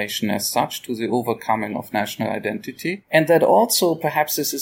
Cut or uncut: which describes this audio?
cut